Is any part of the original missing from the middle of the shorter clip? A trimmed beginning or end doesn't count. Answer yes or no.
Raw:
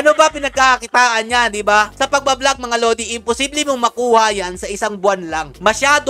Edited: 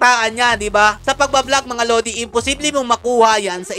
no